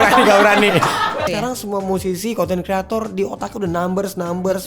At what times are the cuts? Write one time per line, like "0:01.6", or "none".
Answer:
0:01.3